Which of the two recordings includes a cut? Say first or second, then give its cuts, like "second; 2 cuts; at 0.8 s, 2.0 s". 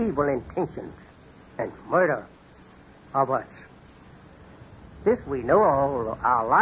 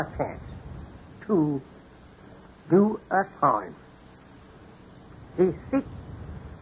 first; 1 cut; at 3.5 s